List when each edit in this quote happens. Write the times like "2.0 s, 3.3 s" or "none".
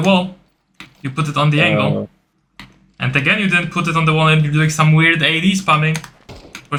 none

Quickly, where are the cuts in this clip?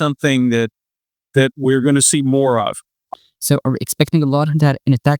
3.0 s

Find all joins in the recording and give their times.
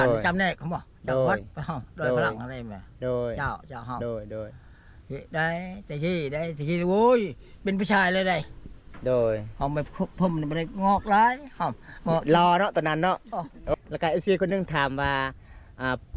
13.6 s

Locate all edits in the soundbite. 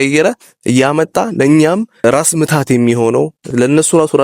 2.0 s, 3.5 s

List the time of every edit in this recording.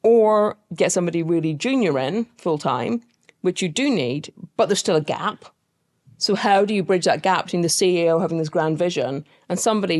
none

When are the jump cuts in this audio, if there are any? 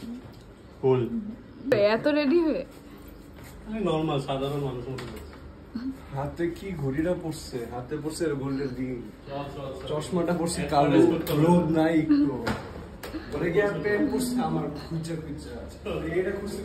1.7 s

